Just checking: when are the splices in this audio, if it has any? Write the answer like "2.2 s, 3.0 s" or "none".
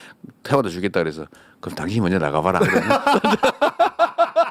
none